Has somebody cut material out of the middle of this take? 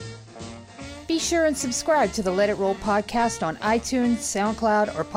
yes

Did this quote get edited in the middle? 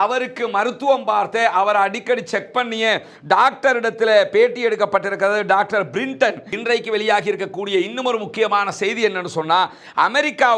yes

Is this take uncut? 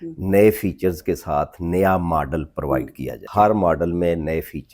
no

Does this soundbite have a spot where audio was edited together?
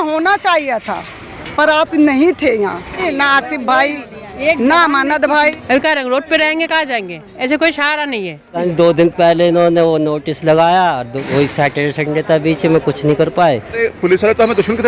yes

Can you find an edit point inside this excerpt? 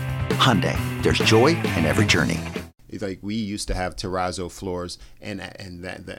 yes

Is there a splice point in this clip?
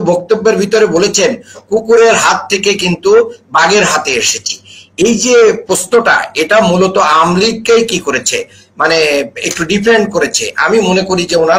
no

